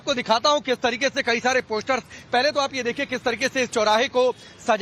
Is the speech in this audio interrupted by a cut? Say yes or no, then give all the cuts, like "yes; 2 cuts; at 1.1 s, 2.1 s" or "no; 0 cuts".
yes; 1 cut; at 3.2 s